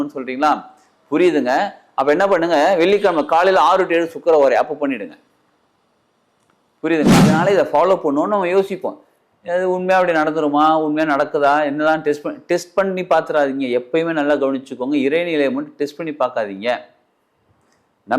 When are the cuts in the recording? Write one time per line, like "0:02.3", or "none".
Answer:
0:07.3